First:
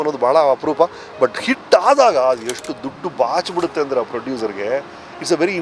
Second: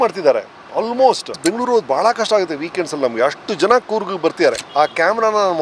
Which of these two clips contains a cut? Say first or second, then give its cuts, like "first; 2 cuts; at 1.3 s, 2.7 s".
second; 2 cuts; at 1.3 s, 4.6 s